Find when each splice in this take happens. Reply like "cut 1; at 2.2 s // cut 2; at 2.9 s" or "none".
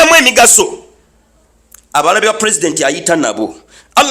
none